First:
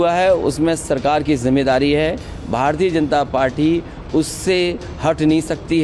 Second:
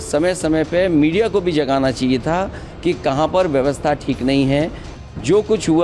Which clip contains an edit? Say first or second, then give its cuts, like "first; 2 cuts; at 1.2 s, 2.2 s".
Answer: second; 1 cut; at 4.8 s